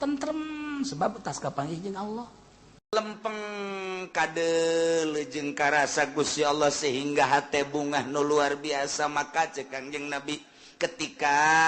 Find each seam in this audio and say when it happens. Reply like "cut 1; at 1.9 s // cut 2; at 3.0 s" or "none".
cut 1; at 2.9 s